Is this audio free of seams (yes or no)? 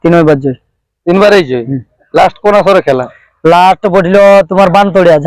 yes